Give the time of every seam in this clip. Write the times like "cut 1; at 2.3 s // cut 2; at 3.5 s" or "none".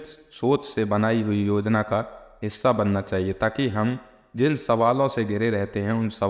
none

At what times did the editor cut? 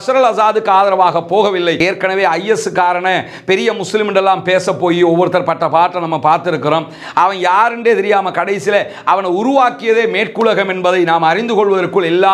cut 1; at 1.8 s

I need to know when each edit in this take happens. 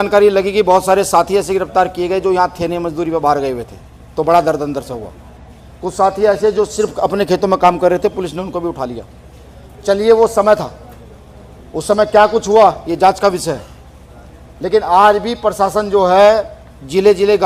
none

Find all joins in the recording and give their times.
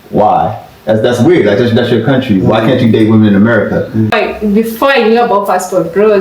cut 1; at 4.1 s

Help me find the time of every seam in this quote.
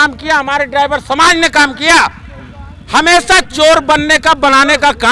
none

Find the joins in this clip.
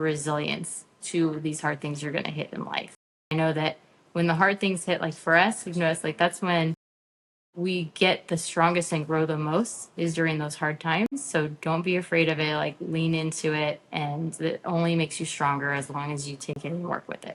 none

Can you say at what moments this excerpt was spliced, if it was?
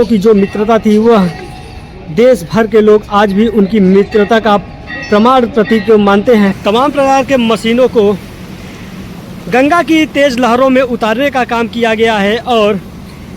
cut 1; at 6.6 s

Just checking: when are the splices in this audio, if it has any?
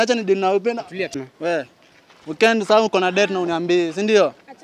cut 1; at 1.2 s

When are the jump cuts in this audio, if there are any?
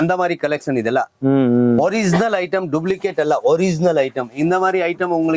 none

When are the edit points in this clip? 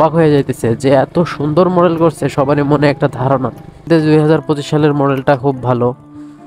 cut 1; at 3.9 s

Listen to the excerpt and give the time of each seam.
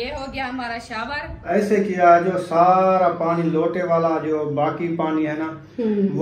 cut 1; at 1.4 s

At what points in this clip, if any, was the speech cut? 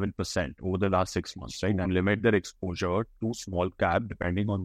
cut 1; at 1.8 s

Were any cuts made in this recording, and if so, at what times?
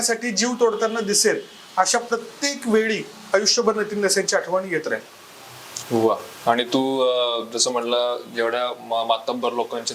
none

